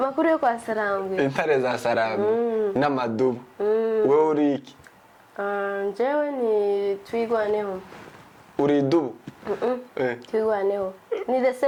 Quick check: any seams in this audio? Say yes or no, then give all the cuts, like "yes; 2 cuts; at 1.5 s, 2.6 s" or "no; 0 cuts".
no; 0 cuts